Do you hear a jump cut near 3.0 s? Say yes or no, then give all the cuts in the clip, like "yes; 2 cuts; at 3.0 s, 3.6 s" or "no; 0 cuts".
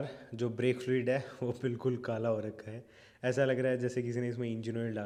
no; 0 cuts